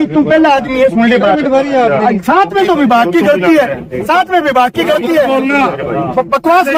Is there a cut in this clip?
no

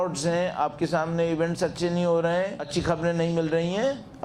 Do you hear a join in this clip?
yes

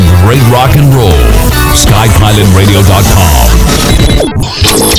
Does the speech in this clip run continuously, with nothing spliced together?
no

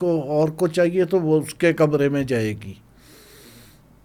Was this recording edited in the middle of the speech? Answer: no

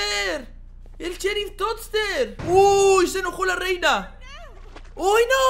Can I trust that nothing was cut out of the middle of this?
no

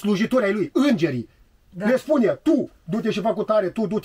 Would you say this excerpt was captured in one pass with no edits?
yes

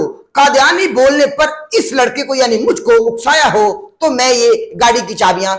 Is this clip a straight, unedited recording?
yes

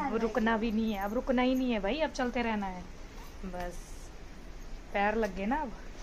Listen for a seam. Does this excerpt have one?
no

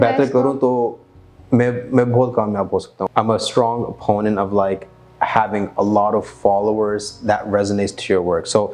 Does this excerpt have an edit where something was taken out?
yes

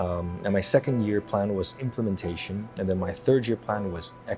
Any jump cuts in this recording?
no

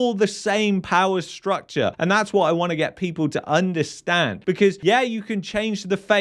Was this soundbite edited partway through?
yes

